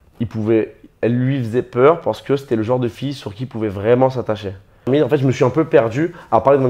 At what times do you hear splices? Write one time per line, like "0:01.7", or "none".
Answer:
0:04.9